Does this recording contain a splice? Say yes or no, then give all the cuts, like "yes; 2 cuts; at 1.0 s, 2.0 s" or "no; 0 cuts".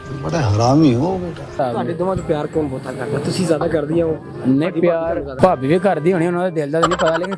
yes; 2 cuts; at 1.5 s, 5.3 s